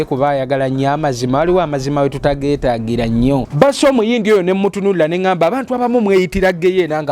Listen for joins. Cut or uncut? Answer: cut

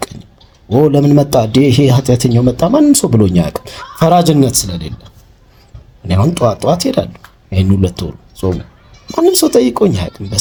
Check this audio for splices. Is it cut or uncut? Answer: uncut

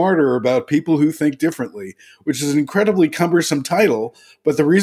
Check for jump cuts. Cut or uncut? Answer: uncut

